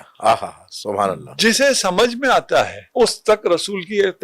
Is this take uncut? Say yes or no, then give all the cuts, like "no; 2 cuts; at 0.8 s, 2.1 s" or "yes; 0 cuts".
no; 1 cut; at 2.8 s